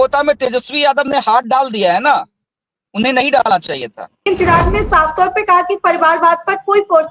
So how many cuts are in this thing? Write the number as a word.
one